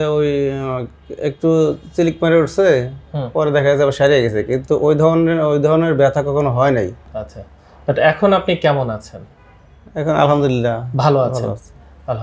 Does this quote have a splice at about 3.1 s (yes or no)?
no